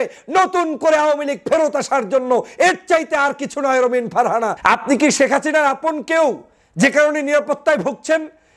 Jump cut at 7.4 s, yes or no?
no